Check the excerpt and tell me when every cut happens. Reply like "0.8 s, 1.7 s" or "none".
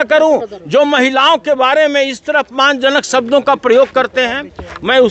none